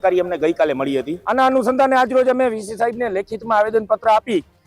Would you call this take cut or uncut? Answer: cut